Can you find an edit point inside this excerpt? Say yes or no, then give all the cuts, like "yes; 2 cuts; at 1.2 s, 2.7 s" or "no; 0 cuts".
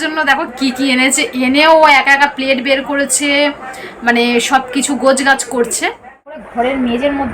yes; 1 cut; at 6.5 s